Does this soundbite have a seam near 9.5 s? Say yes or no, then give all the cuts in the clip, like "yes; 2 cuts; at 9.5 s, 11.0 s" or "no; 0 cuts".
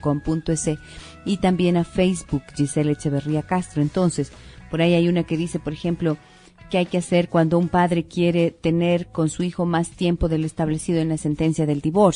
yes; 1 cut; at 9.5 s